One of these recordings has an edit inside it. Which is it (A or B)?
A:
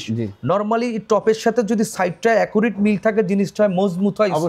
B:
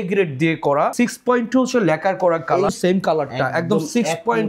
B